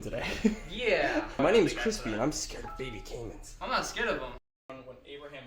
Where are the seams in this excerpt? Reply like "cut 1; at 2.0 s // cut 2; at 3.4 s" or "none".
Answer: cut 1; at 4.4 s